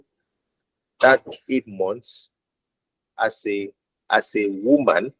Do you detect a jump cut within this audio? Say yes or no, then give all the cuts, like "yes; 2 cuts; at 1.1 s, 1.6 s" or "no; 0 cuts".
no; 0 cuts